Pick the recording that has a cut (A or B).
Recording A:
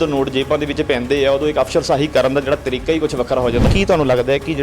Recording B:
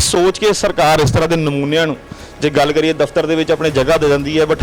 A